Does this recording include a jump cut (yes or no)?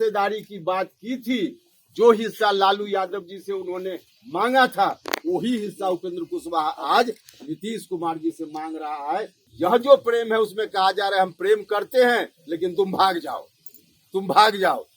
yes